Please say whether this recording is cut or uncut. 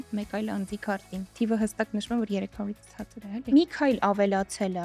cut